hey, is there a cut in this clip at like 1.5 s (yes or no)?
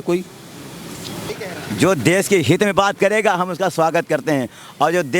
yes